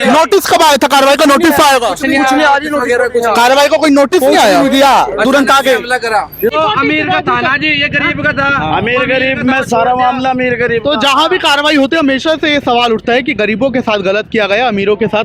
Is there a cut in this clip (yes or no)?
yes